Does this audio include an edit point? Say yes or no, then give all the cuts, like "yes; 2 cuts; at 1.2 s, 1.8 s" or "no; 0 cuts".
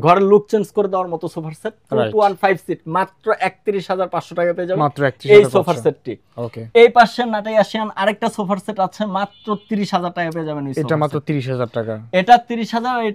no; 0 cuts